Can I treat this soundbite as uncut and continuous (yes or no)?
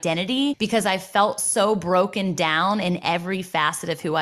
yes